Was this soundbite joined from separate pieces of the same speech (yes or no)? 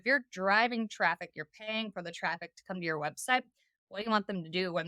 no